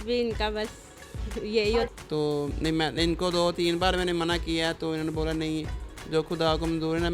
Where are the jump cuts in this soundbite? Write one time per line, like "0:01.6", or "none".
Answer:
0:01.9